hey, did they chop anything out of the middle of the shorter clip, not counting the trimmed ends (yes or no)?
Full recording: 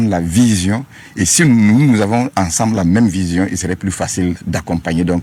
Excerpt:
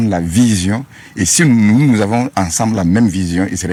no